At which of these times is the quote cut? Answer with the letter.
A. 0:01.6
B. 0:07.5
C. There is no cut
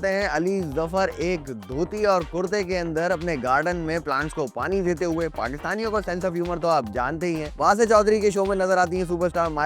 B